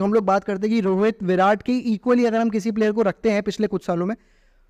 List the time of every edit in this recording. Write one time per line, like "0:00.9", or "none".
none